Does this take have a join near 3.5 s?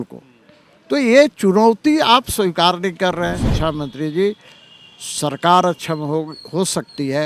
yes; 1 cut; at 3.5 s

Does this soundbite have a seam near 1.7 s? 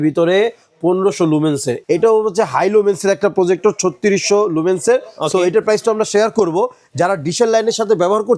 yes; 1 cut; at 1.7 s

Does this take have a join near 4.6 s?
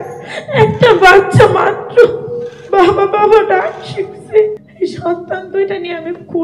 yes; 1 cut; at 4.6 s

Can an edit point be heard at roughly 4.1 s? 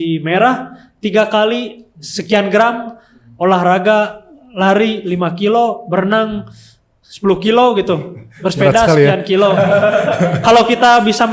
no; 0 cuts

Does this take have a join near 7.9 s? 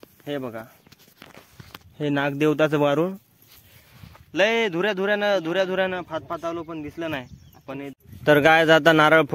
yes; 1 cut; at 7.9 s

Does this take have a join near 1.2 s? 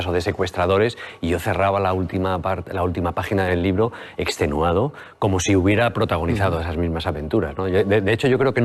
no; 1 cut; at 7.0 s

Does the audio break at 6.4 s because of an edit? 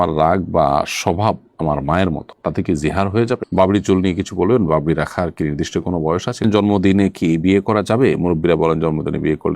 yes; 2 cuts; at 3.5 s, 6.4 s

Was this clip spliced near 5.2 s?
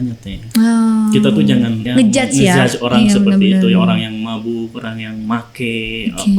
no; 1 cut; at 1.8 s

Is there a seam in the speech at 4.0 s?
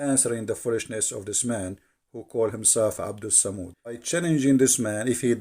yes; 1 cut; at 4.0 s

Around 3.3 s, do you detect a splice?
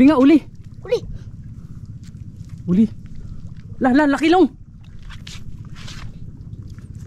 no; 0 cuts

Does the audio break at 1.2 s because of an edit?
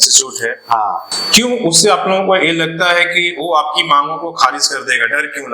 yes; 1 cut; at 1.2 s

